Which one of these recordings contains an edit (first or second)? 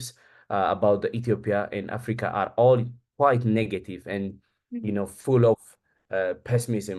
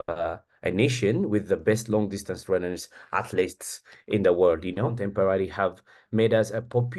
second